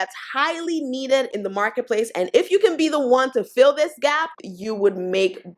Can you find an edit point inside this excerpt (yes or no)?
yes